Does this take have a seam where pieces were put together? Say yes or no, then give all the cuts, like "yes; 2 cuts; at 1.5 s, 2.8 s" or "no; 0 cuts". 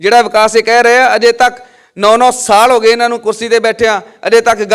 no; 0 cuts